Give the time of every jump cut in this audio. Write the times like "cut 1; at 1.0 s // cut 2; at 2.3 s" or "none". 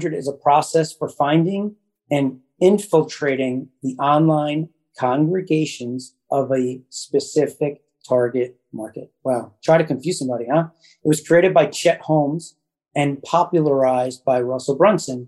none